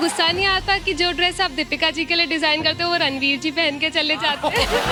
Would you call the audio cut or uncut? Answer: uncut